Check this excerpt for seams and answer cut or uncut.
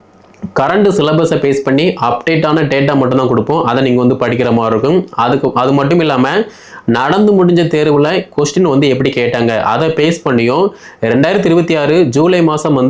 uncut